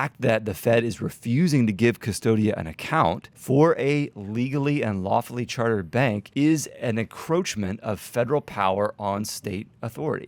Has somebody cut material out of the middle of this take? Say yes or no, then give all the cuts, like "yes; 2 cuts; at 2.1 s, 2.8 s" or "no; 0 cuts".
yes; 2 cuts; at 3.3 s, 6.2 s